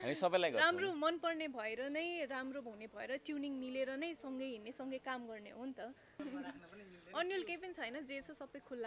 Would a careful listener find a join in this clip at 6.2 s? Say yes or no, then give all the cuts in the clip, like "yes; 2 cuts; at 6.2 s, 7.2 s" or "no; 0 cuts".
yes; 1 cut; at 6.2 s